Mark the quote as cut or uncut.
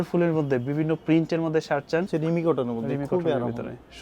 cut